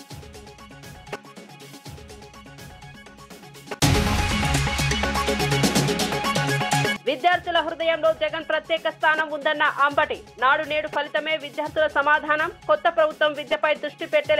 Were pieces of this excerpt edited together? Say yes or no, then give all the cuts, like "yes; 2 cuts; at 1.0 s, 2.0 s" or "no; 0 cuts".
no; 0 cuts